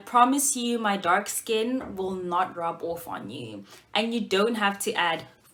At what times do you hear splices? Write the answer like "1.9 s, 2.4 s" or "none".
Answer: none